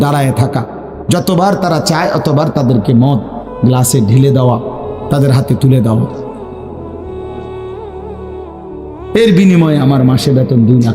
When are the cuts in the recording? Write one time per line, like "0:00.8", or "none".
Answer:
0:06.3
0:09.1